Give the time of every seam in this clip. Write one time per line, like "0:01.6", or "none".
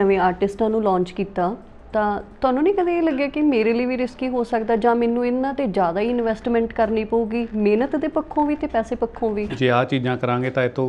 0:01.7
0:09.5

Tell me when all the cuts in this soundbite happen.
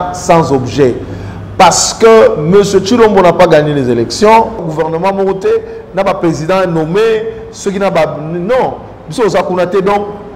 0:04.7

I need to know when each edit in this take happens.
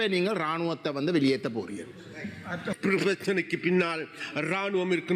0:02.8

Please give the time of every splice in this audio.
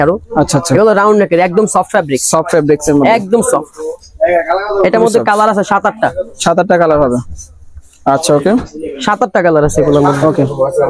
none

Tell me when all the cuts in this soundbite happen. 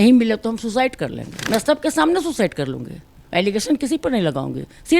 0:01.3

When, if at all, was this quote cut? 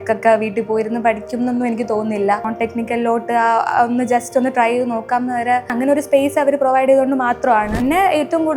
0:02.5
0:05.7
0:07.8

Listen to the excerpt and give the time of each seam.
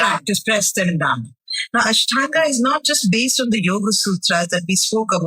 0:01.3

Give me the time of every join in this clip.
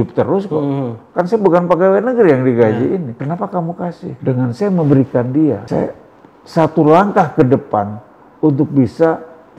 0:03.1
0:04.2
0:05.6

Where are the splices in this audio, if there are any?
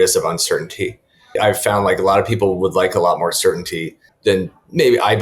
0:01.4

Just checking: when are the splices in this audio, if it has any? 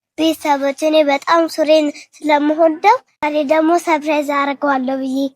0:03.1

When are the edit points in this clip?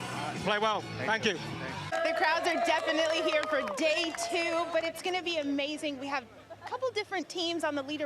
0:01.9

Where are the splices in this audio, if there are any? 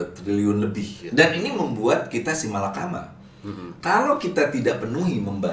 0:01.0

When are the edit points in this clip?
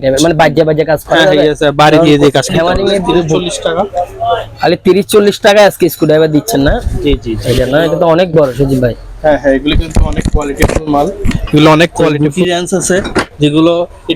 0:03.4
0:07.3
0:12.2

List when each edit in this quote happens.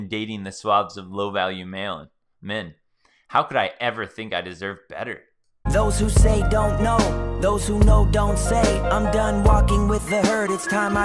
0:05.5

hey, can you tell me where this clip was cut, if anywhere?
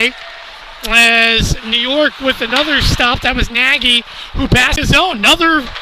0:04.8

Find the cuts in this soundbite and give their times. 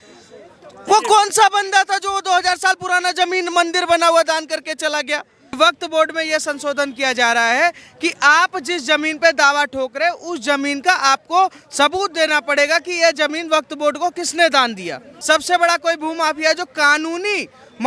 0:05.6
0:15.1

